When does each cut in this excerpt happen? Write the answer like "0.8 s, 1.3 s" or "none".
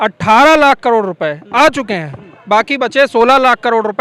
none